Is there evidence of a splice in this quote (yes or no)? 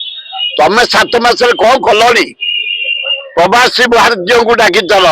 no